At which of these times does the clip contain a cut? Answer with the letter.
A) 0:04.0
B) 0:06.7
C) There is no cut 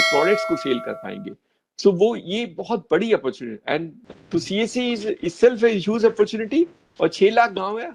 A